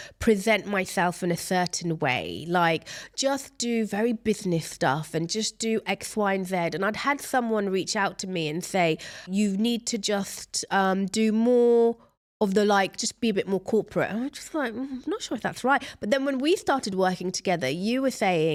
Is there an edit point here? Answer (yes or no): no